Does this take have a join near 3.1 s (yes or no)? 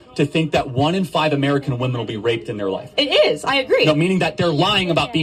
no